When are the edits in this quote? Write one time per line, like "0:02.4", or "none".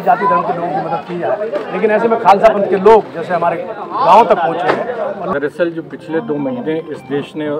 0:05.2